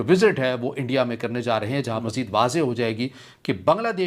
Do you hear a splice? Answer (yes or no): yes